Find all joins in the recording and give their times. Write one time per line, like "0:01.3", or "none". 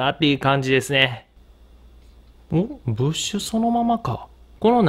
none